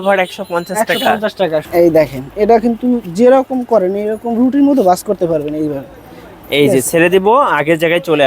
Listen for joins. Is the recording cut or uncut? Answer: cut